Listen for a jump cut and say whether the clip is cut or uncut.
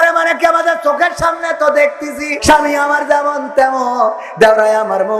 cut